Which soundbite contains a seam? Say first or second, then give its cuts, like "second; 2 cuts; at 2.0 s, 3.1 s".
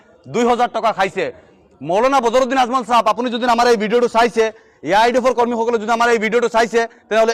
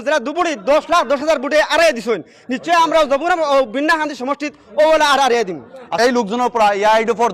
second; 1 cut; at 5.9 s